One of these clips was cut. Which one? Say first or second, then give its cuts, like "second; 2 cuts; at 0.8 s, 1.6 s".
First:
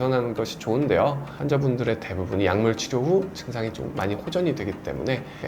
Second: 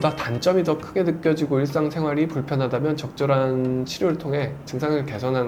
first; 1 cut; at 1.3 s